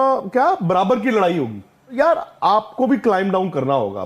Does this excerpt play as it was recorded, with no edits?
no; 1 cut; at 2.0 s

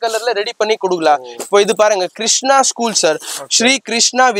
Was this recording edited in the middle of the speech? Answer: no; 0 cuts

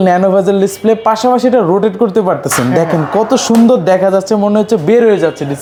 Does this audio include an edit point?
no; 0 cuts

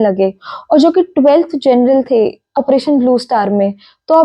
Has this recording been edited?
yes; 1 cut; at 2.5 s

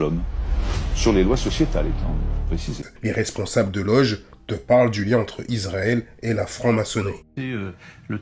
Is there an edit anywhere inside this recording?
no; 0 cuts

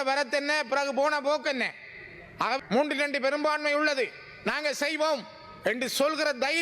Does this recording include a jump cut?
yes; 1 cut; at 2.6 s

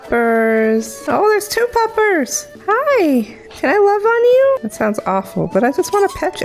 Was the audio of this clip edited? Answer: yes; 3 cuts; at 1.0 s, 2.5 s, 4.7 s

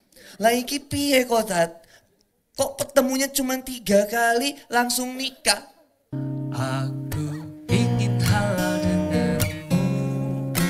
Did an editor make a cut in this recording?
yes; 1 cut; at 6.1 s

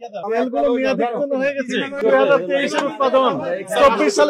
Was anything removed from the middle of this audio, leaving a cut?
yes; 1 cut; at 2.0 s

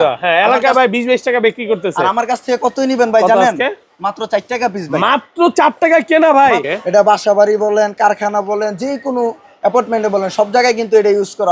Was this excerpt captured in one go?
no; 1 cut; at 6.7 s

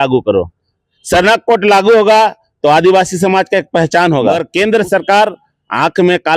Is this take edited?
yes; 1 cut; at 4.4 s

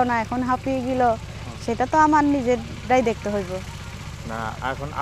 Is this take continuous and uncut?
yes; 0 cuts

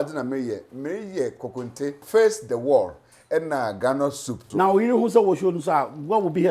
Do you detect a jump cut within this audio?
yes; 2 cuts; at 2.0 s, 4.4 s

